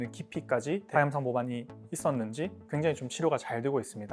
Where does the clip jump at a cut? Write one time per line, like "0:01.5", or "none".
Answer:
none